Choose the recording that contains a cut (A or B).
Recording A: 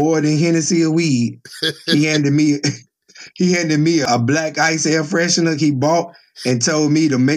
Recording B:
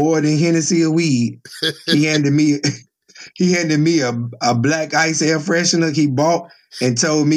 A